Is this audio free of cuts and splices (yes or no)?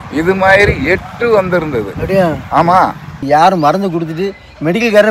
no